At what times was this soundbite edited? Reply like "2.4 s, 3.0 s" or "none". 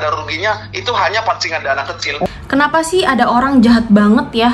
2.3 s